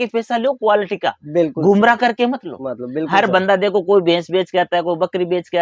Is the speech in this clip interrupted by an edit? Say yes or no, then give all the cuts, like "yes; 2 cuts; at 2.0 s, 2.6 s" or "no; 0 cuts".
no; 0 cuts